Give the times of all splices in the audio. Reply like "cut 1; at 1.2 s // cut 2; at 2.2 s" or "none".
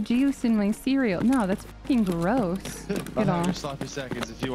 cut 1; at 3.1 s